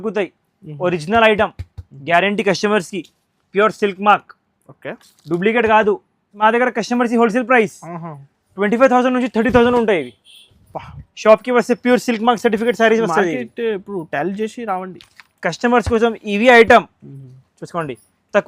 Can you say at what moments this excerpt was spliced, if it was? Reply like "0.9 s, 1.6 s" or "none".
6.3 s